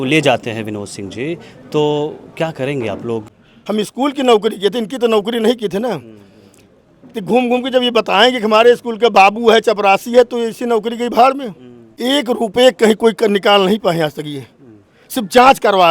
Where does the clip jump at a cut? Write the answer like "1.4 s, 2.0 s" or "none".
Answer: 3.3 s, 11.9 s